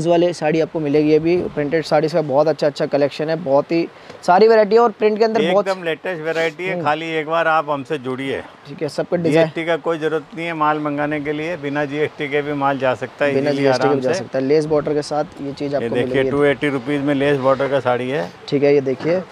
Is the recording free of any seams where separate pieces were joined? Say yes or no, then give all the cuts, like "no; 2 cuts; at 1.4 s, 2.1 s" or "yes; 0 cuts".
yes; 0 cuts